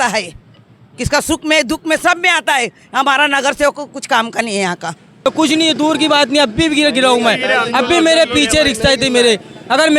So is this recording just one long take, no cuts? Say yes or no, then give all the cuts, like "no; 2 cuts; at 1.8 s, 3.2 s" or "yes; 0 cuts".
no; 1 cut; at 5.3 s